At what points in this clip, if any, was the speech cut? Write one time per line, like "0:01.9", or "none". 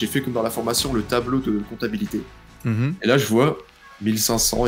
none